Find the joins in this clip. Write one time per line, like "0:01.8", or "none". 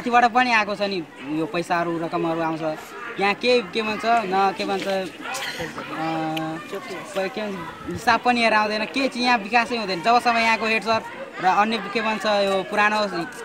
none